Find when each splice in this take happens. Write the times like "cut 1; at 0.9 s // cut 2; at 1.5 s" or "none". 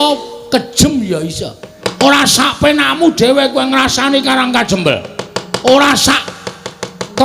cut 1; at 1.8 s